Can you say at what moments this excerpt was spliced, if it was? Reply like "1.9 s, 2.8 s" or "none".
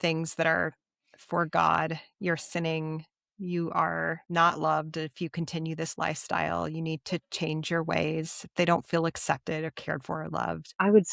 4.3 s